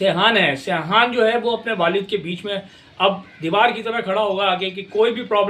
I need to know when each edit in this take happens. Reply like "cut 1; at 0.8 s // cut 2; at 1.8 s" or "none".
none

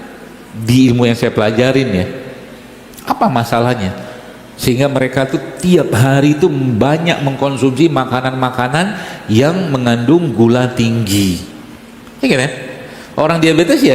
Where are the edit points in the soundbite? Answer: none

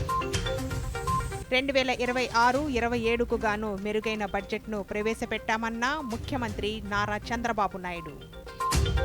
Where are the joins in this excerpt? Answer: cut 1; at 1.4 s

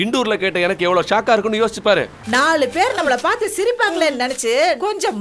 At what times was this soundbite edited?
cut 1; at 2.2 s

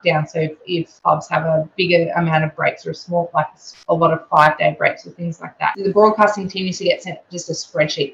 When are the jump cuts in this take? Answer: cut 1; at 5.8 s

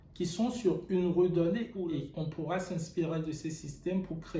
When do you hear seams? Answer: cut 1; at 1.8 s

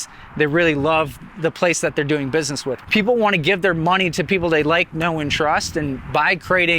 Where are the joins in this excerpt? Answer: cut 1; at 2.7 s

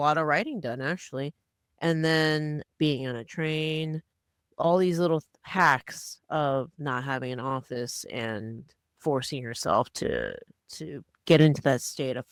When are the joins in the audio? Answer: none

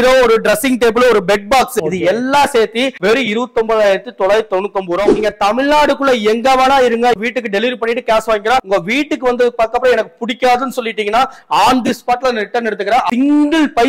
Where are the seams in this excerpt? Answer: cut 1; at 1.8 s // cut 2; at 5.1 s // cut 3; at 7.2 s // cut 4; at 8.7 s // cut 5; at 13.1 s

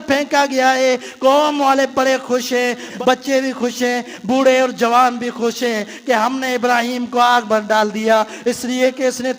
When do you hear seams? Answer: cut 1; at 2.9 s

